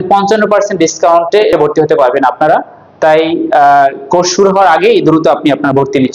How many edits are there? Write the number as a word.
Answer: one